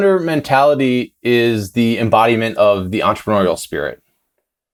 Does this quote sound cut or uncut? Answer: uncut